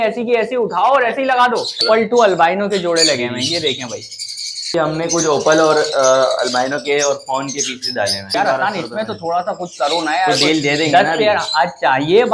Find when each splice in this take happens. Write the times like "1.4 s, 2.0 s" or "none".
1.8 s, 4.7 s, 8.2 s